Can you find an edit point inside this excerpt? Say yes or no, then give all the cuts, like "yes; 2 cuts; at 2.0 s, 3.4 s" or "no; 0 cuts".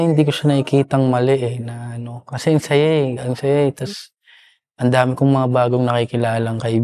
no; 0 cuts